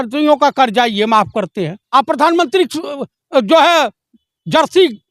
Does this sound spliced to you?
yes; 1 cut; at 1.8 s

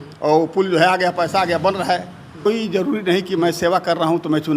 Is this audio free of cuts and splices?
no; 1 cut; at 2.5 s

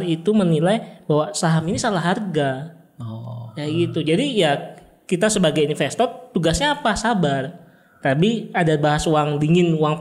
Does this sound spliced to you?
no; 0 cuts

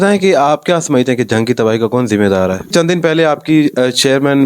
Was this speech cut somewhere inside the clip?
yes; 1 cut; at 2.7 s

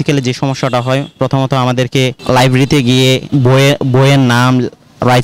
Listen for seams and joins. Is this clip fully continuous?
no; 2 cuts; at 2.2 s, 3.2 s

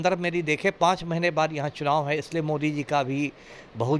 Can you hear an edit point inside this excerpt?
no; 0 cuts

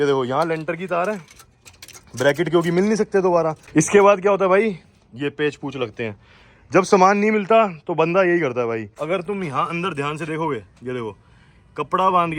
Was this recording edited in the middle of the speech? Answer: yes; 2 cuts; at 3.6 s, 8.9 s

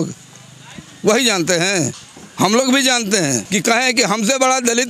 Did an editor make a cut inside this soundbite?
yes; 1 cut; at 3.4 s

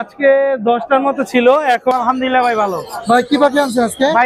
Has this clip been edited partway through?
yes; 1 cut; at 1.9 s

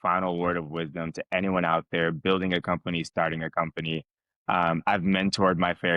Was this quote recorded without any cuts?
yes; 0 cuts

